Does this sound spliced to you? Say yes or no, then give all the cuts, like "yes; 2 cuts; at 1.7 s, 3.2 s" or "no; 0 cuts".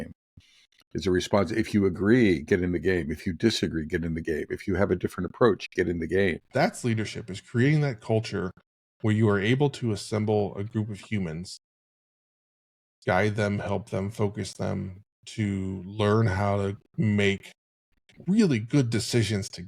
yes; 1 cut; at 6.4 s